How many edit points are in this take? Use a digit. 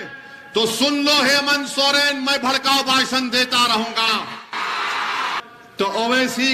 1